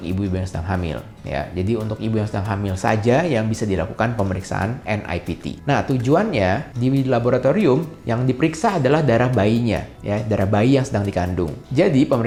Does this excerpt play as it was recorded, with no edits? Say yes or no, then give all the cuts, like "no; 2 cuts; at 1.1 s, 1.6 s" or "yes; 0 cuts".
yes; 0 cuts